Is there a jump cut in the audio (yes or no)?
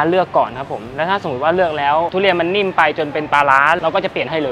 no